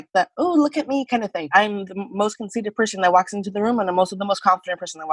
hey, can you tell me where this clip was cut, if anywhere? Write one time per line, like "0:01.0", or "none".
0:01.5

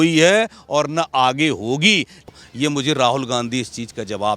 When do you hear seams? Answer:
0:02.3

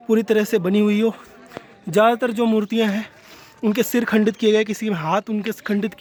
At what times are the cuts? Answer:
none

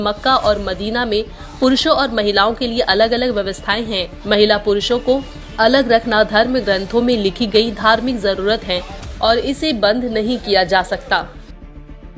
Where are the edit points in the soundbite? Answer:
0:11.3

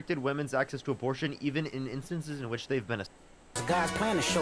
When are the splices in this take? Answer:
0:03.5

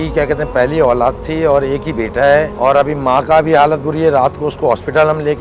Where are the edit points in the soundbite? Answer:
0:02.5

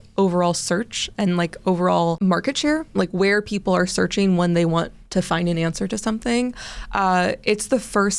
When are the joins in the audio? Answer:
0:02.2

